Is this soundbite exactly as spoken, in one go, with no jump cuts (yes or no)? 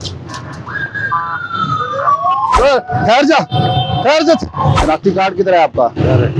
no